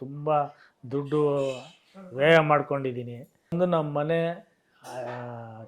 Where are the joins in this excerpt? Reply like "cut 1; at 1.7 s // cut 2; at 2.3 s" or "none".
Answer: cut 1; at 3.5 s

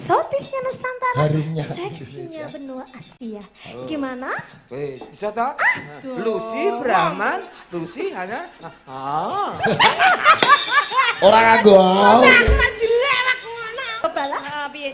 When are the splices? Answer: cut 1; at 14.0 s

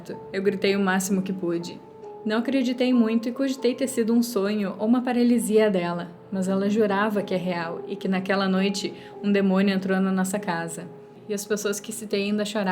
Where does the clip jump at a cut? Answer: cut 1; at 2.0 s // cut 2; at 11.1 s

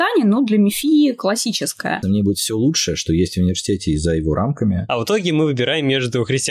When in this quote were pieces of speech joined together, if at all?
cut 1; at 2.0 s // cut 2; at 4.8 s

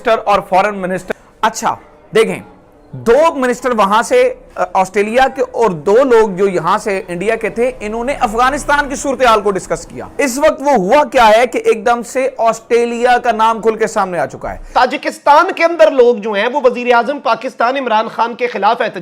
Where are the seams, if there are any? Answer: cut 1; at 1.0 s // cut 2; at 10.0 s // cut 3; at 14.6 s

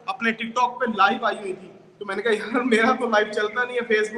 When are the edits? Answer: none

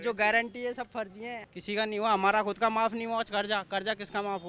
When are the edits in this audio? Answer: none

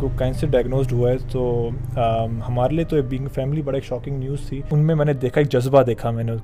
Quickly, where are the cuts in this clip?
cut 1; at 4.6 s

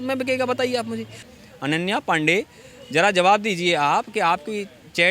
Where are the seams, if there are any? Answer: cut 1; at 1.2 s

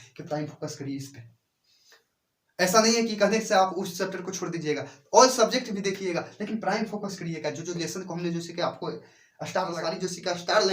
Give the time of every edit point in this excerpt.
cut 1; at 9.8 s

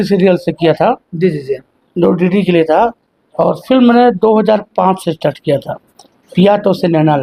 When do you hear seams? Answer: none

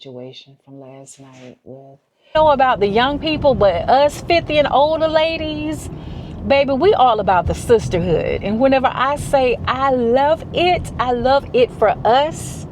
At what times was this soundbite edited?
cut 1; at 2.3 s

